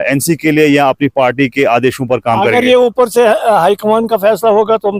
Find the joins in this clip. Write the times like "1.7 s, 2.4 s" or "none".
none